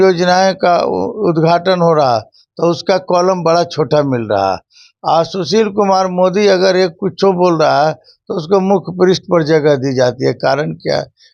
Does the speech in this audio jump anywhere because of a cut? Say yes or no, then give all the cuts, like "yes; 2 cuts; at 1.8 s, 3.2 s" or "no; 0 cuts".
no; 0 cuts